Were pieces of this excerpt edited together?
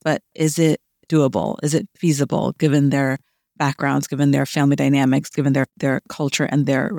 no; 0 cuts

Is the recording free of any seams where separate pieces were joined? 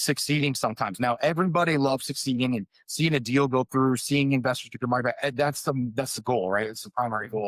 yes; 0 cuts

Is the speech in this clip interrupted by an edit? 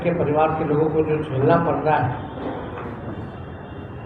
no; 0 cuts

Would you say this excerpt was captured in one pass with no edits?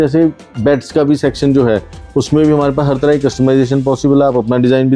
yes; 0 cuts

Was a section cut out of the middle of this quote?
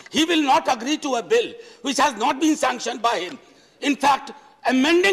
no; 0 cuts

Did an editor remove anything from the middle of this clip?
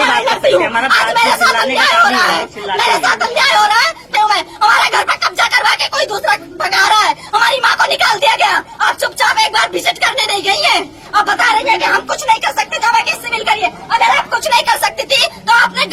no; 0 cuts

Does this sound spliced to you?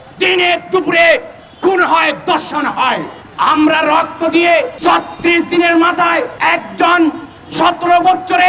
yes; 3 cuts; at 3.2 s, 4.7 s, 6.3 s

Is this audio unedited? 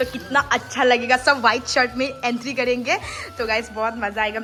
yes; 0 cuts

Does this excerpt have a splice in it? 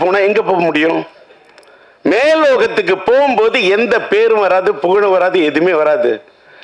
no; 0 cuts

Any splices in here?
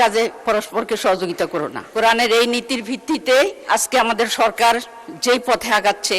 yes; 2 cuts; at 1.9 s, 3.6 s

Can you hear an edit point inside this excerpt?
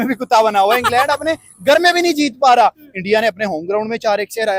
no; 0 cuts

